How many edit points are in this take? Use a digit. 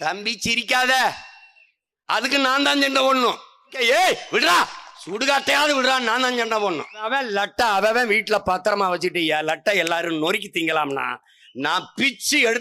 2